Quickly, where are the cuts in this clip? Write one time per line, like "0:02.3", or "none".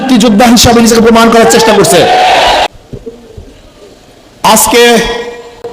0:02.7